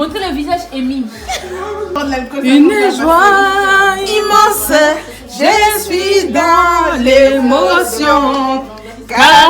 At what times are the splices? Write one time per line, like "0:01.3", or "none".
0:02.0